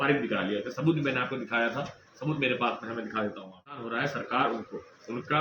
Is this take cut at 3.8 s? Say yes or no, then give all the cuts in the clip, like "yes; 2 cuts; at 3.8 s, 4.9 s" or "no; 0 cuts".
yes; 1 cut; at 3.8 s